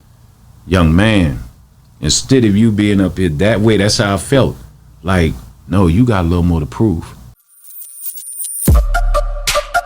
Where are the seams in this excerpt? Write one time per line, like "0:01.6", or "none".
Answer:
0:07.5